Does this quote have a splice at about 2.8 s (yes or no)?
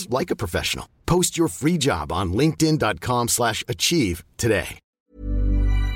no